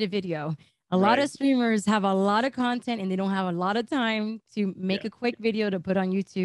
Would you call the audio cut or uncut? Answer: uncut